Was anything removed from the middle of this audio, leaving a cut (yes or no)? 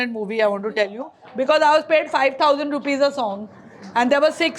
no